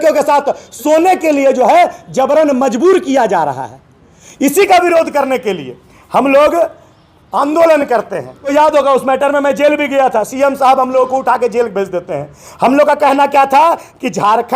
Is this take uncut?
no; 1 cut; at 8.5 s

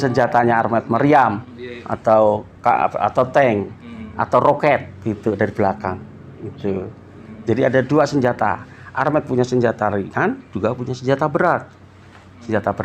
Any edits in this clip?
no; 0 cuts

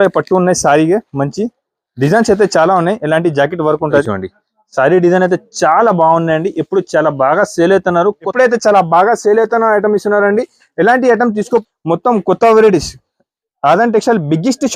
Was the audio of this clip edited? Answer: yes; 3 cuts; at 4.1 s, 8.2 s, 11.6 s

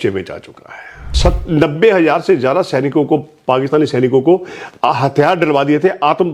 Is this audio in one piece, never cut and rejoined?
no; 1 cut; at 1.1 s

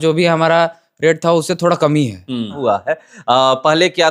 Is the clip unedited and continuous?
no; 1 cut; at 2.6 s

